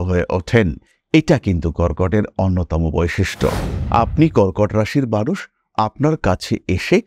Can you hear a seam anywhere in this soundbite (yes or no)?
yes